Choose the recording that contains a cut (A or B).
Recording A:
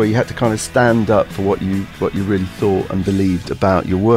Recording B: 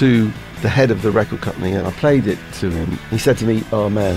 B